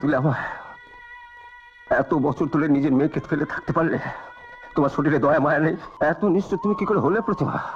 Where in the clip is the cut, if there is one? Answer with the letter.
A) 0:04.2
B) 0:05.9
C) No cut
B